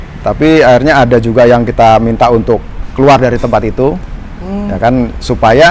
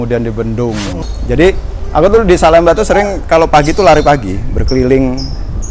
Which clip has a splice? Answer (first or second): second